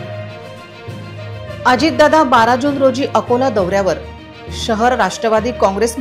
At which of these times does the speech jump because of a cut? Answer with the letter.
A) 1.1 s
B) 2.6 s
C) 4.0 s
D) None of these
A